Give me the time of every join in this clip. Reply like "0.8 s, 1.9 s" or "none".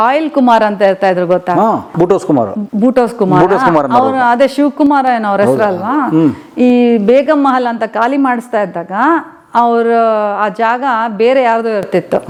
none